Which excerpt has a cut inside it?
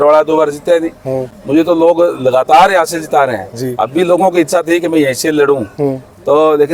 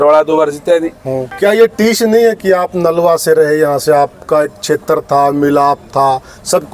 second; 1 cut; at 1.2 s

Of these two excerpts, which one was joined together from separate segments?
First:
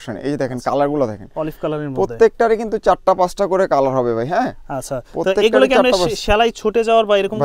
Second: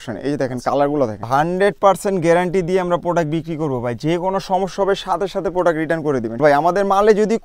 second; 2 cuts; at 1.3 s, 6.4 s

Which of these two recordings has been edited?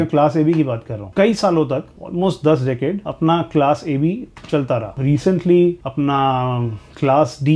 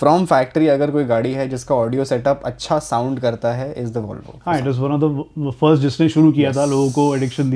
first; 5 cuts; at 1.0 s, 2.0 s, 3.1 s, 4.9 s, 5.8 s

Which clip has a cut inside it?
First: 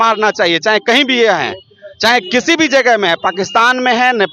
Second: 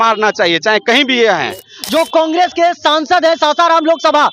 second; 1 cut; at 1.7 s

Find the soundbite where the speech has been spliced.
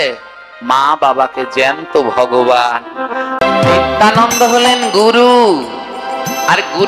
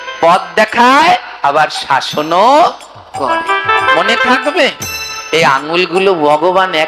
first; 1 cut; at 3.4 s

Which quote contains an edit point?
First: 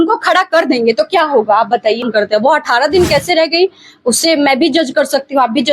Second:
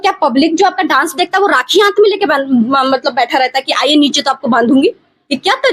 first; 1 cut; at 2.1 s

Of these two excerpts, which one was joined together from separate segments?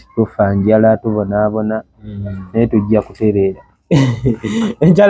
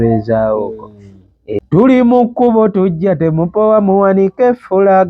second; 1 cut; at 1.6 s

